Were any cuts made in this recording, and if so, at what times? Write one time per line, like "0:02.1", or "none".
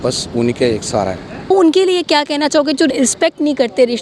0:01.5